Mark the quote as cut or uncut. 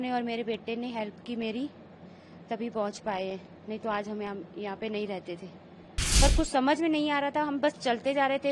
cut